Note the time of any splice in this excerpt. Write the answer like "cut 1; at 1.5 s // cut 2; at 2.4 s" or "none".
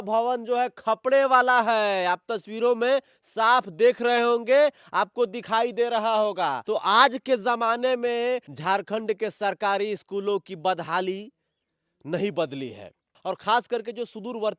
none

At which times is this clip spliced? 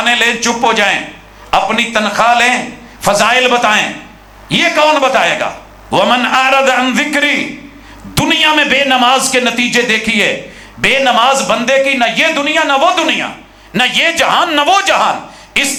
none

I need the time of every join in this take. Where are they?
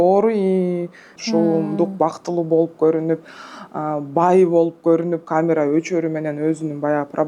cut 1; at 1.1 s

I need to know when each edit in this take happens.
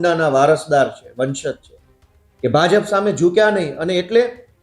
none

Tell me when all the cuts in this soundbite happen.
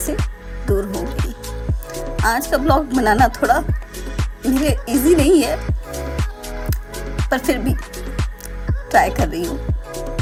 none

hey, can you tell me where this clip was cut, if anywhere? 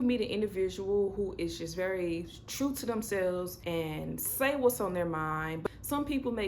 cut 1; at 3.6 s // cut 2; at 5.6 s

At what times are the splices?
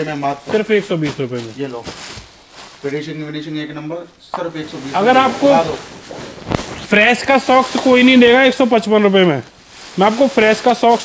none

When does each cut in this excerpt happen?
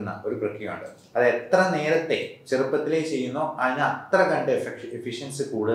none

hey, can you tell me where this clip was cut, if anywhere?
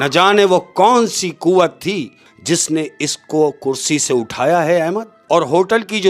cut 1; at 2.3 s // cut 2; at 5.1 s

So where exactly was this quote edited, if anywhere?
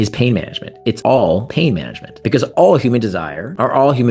none

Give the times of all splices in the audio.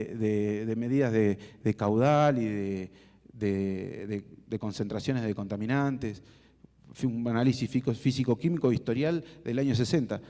none

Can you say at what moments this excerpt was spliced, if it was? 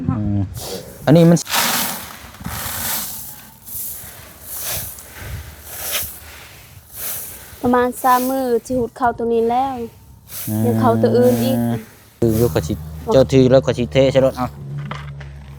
cut 1; at 1.4 s // cut 2; at 12.2 s

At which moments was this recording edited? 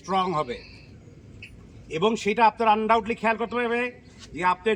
none

